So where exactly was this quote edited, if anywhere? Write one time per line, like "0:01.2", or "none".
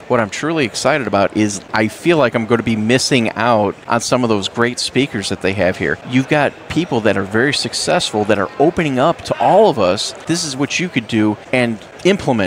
0:01.6
0:03.8
0:06.0
0:10.2
0:11.5